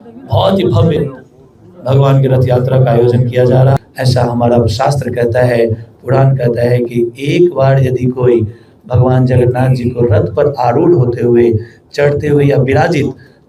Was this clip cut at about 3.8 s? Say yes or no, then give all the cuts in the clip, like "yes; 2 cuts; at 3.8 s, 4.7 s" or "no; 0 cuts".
yes; 1 cut; at 3.8 s